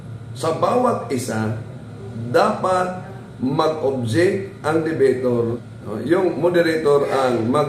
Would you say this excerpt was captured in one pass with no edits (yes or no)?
no